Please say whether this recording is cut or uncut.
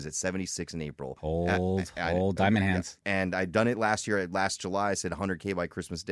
cut